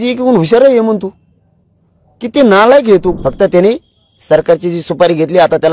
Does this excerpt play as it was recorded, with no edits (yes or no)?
no